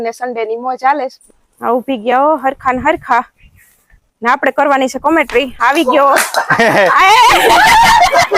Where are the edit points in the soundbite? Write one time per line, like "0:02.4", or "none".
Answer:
0:01.2

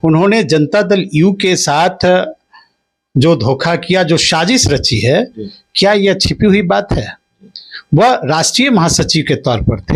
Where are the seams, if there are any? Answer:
none

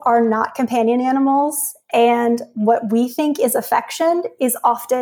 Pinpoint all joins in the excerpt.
none

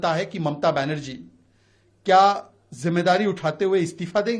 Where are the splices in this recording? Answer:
none

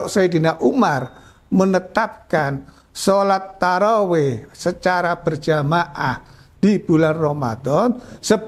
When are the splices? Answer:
none

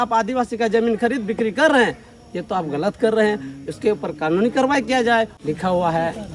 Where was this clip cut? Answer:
0:05.3

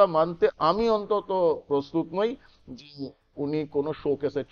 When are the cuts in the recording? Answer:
none

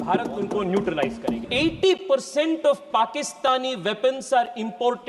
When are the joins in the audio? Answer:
0:01.4

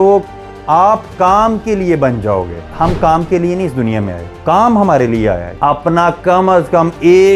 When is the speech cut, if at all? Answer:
0:02.7
0:04.3
0:05.5

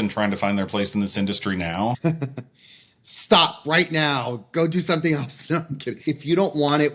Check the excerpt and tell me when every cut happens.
0:06.0

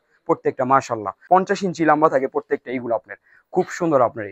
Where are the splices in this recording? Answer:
0:01.1

